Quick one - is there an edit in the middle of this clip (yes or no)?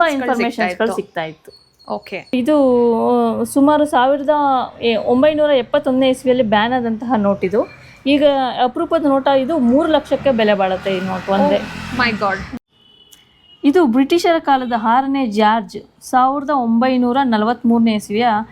yes